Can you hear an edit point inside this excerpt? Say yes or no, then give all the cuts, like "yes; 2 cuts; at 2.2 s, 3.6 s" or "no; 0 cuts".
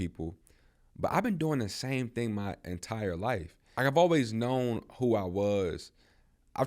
yes; 1 cut; at 3.6 s